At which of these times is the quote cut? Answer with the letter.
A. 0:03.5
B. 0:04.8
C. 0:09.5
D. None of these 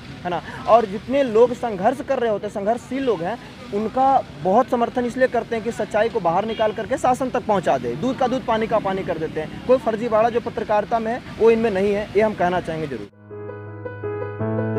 D